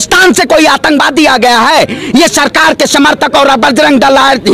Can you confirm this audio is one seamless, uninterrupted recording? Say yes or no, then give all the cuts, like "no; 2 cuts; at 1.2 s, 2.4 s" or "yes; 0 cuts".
yes; 0 cuts